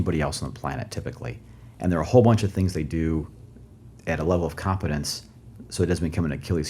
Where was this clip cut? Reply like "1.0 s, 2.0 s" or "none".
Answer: none